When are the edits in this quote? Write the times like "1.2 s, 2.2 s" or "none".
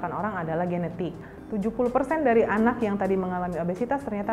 1.2 s